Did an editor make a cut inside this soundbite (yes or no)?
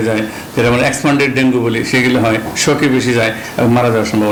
no